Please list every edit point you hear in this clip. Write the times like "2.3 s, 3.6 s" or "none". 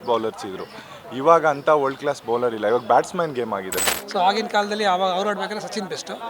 3.9 s